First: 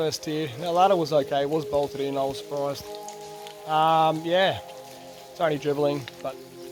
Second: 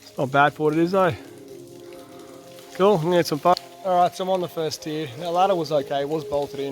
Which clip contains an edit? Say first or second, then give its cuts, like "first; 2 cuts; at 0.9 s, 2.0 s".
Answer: second; 1 cut; at 3.5 s